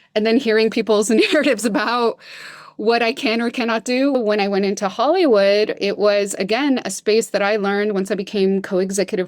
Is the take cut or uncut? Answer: cut